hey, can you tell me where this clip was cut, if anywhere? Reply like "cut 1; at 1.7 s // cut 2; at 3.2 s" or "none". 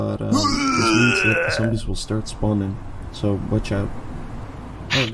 none